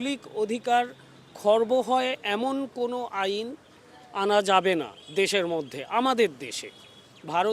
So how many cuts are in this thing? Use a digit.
0